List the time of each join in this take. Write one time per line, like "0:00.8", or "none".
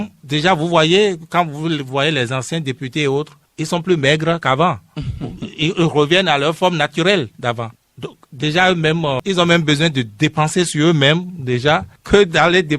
0:09.2